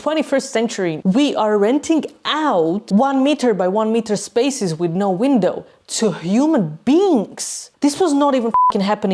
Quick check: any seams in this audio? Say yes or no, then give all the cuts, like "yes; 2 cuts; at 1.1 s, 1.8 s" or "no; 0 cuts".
yes; 1 cut; at 1.0 s